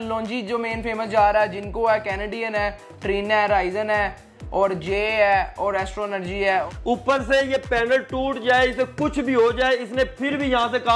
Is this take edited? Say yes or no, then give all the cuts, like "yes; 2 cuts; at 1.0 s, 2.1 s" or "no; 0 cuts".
yes; 1 cut; at 6.7 s